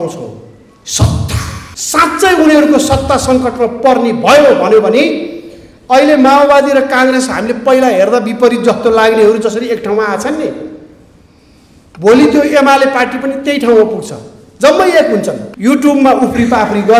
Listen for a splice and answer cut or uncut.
cut